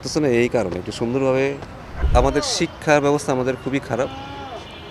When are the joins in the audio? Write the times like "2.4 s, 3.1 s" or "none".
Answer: 2.0 s